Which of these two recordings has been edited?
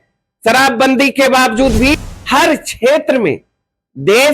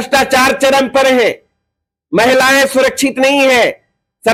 first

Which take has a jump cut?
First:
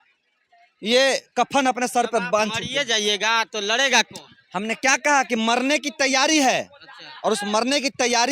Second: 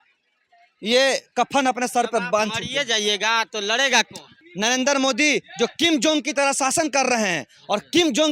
second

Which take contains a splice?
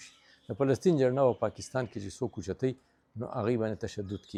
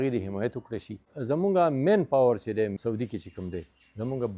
second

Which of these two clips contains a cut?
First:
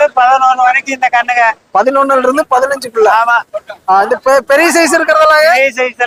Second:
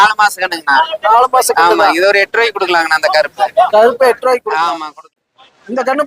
second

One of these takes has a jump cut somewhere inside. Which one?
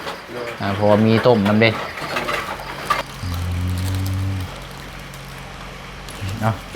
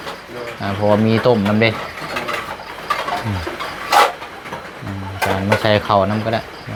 first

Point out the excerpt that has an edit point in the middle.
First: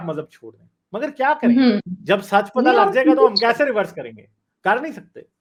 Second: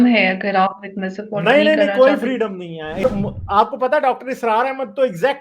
second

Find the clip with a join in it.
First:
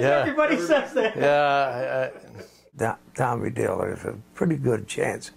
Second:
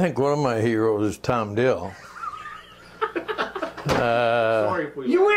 first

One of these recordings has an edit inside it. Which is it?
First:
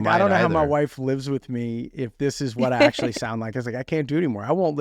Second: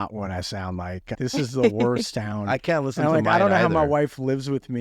second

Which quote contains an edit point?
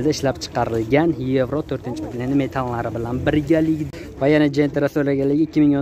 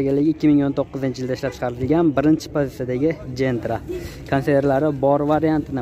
first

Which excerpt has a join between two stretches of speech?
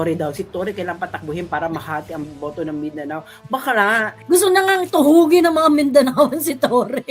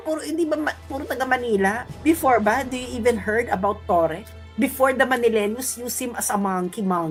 first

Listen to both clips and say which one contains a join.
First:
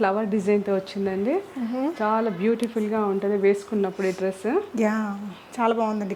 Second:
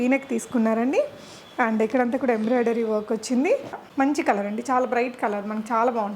second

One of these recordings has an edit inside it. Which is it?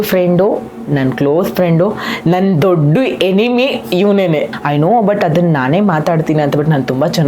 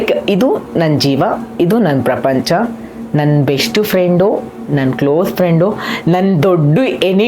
first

